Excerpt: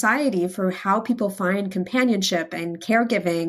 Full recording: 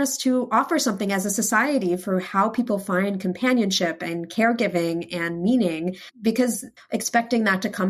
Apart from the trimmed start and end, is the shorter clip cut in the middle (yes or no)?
no